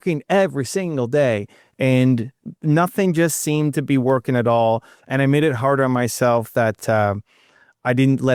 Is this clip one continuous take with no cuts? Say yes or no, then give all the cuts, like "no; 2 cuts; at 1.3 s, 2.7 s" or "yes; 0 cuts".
yes; 0 cuts